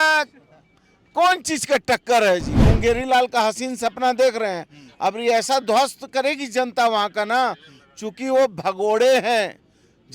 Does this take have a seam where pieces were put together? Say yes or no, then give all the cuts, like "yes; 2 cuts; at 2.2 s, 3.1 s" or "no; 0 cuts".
yes; 1 cut; at 2.6 s